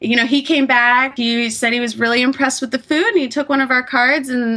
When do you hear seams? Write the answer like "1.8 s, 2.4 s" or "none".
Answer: 1.1 s